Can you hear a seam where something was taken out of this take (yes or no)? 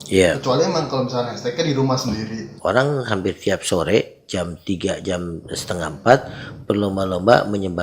yes